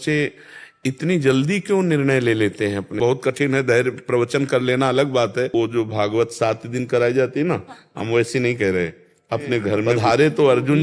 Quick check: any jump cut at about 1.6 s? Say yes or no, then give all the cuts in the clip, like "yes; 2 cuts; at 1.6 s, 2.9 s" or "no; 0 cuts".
no; 3 cuts; at 3.0 s, 5.5 s, 9.9 s